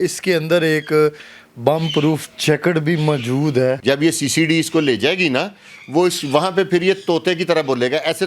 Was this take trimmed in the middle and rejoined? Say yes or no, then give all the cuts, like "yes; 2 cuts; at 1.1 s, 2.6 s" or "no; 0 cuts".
yes; 1 cut; at 3.8 s